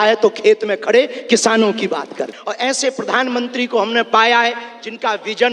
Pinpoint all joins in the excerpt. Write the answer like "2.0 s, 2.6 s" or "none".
2.3 s